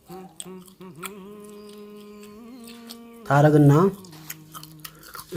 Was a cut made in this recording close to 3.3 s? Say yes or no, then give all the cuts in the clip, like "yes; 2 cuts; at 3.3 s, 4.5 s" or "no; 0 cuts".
yes; 1 cut; at 3.3 s